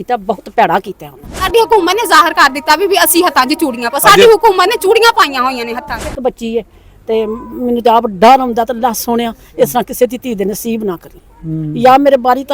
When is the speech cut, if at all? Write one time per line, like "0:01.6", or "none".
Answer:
0:01.5
0:06.2